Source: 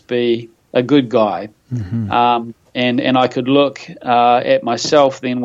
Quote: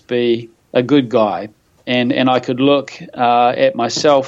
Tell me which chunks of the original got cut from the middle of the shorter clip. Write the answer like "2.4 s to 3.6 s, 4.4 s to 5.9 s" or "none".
1.7 s to 2.6 s